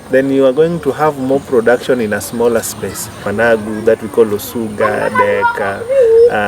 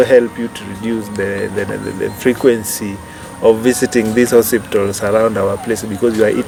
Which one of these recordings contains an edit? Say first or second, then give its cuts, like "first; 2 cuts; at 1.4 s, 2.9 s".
first; 1 cut; at 3.2 s